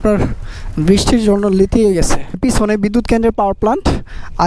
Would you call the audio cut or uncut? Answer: cut